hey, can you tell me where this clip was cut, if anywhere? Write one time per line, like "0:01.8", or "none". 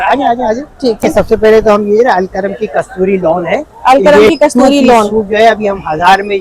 0:01.0